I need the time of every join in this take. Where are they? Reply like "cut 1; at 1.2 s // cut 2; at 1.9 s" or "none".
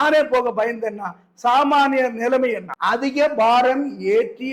cut 1; at 2.7 s